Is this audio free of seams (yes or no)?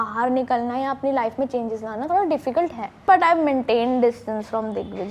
no